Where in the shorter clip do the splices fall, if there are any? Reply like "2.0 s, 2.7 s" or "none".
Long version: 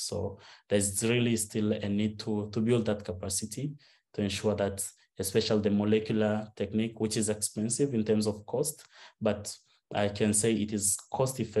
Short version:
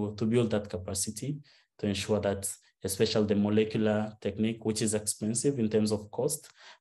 none